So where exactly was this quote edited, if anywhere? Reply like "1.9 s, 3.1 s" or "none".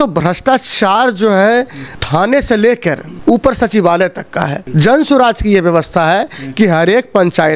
4.7 s